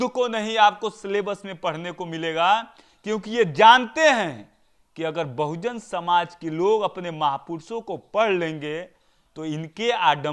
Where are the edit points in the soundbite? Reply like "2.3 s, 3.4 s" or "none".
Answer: none